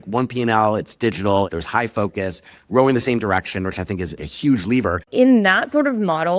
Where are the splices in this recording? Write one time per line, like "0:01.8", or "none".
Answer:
0:01.5
0:04.3
0:05.1